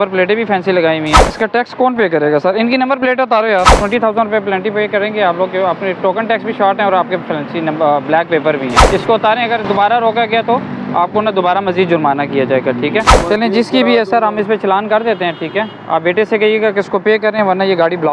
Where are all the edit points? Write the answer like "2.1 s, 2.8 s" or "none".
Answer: 1.2 s, 3.8 s, 8.8 s, 13.2 s

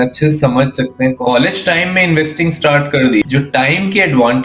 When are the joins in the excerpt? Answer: 1.2 s, 3.2 s

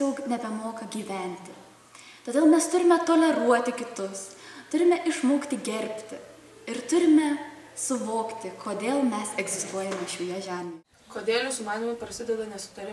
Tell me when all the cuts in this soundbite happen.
10.5 s

